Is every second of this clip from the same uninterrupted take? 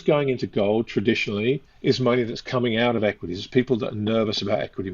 yes; 0 cuts

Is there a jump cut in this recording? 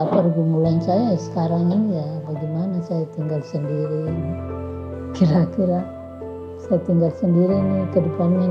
no; 0 cuts

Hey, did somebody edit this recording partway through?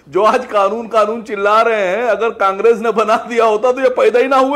no; 0 cuts

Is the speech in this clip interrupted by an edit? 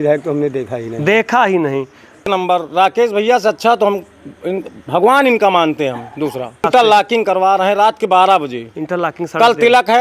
yes; 2 cuts; at 2.2 s, 6.6 s

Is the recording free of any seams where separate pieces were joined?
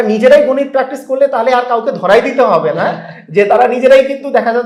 yes; 0 cuts

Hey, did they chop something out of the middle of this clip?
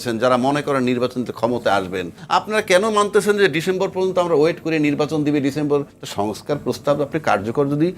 yes; 2 cuts; at 2.2 s, 5.9 s

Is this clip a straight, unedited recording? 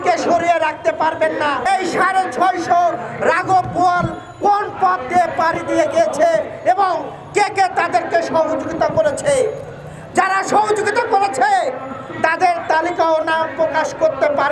no; 1 cut; at 1.7 s

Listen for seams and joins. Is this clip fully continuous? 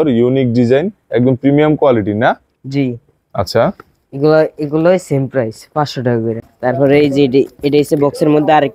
no; 1 cut; at 6.4 s

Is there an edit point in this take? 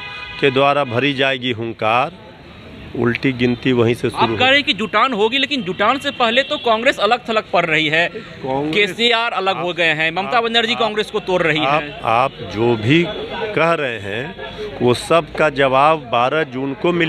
no; 0 cuts

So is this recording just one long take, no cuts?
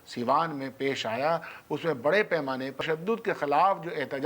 no; 1 cut; at 2.8 s

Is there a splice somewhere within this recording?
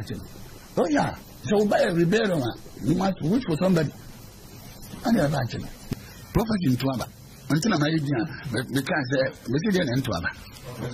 yes; 1 cut; at 5.8 s

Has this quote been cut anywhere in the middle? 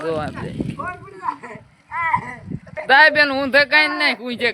yes; 1 cut; at 2.8 s

